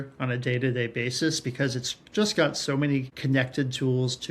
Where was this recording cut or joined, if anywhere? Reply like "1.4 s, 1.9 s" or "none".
3.1 s